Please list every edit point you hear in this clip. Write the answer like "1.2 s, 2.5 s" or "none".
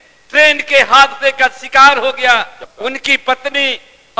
2.6 s